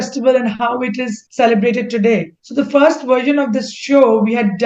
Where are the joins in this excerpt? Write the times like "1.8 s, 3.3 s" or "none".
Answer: 1.2 s, 2.4 s